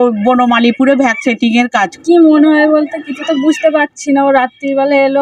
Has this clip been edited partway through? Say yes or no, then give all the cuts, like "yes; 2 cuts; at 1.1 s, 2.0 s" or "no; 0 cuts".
yes; 1 cut; at 1.9 s